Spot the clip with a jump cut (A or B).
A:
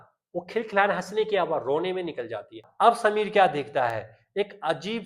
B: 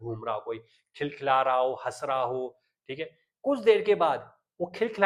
A